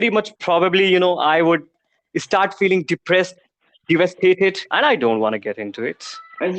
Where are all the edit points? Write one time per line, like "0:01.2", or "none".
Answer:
0:04.6